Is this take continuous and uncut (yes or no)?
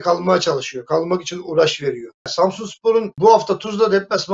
no